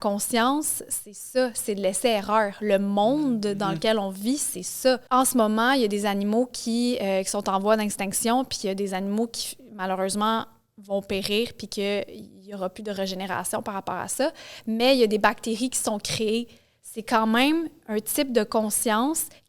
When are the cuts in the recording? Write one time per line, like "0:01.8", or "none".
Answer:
0:05.0